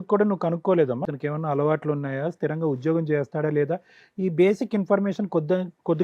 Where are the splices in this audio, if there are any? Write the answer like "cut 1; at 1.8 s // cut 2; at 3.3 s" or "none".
cut 1; at 1.0 s